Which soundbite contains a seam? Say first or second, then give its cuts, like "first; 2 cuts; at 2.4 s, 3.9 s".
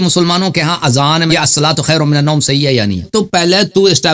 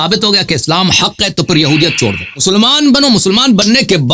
first; 2 cuts; at 1.3 s, 3.1 s